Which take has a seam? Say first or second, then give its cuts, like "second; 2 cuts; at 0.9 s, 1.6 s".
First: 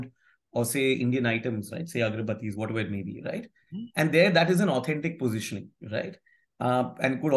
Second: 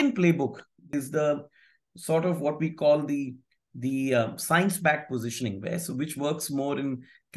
second; 1 cut; at 0.9 s